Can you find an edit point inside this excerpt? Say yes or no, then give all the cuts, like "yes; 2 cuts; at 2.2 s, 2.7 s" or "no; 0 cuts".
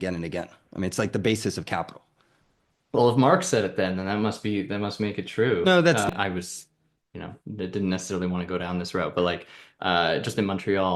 yes; 1 cut; at 6.1 s